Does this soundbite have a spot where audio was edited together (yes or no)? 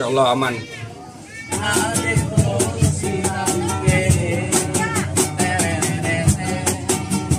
yes